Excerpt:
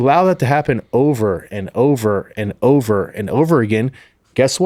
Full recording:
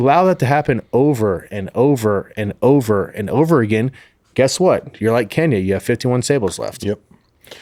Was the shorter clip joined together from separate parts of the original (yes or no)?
no